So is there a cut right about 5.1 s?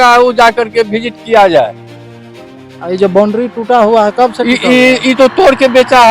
no; 0 cuts

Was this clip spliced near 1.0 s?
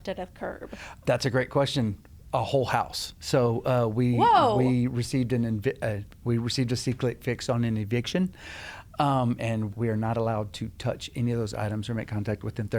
yes; 1 cut; at 1.0 s

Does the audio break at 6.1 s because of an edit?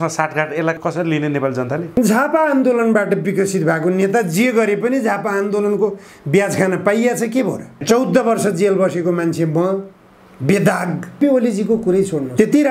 no; 2 cuts; at 7.8 s, 11.2 s

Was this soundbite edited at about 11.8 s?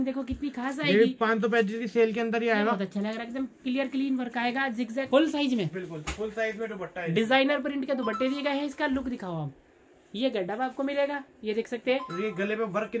no; 1 cut; at 5.1 s

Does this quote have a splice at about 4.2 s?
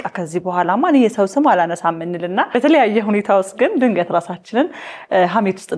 no; 1 cut; at 2.5 s

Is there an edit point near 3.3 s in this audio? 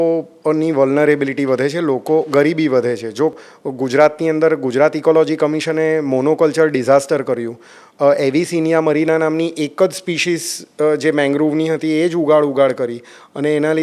yes; 1 cut; at 3.3 s

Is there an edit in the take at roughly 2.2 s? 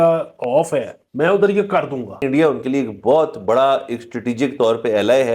yes; 2 cuts; at 1.0 s, 2.2 s

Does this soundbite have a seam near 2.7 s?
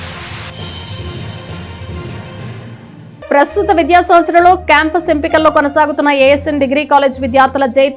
yes; 1 cut; at 2.7 s

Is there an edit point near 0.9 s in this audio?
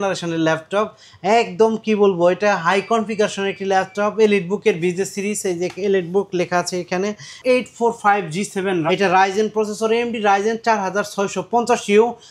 no; 1 cut; at 7.4 s

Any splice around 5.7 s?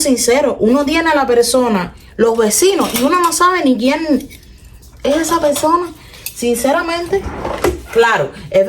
no; 1 cut; at 7.4 s

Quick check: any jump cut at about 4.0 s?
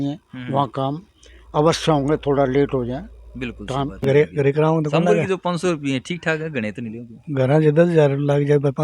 yes; 1 cut; at 4.0 s

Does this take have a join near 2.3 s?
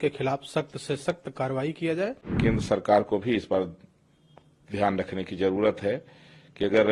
yes; 1 cut; at 2.3 s

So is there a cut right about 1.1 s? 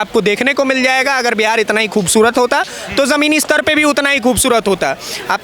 no; 0 cuts

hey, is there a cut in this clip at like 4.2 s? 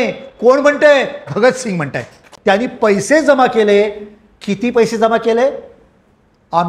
no; 1 cut; at 2.3 s

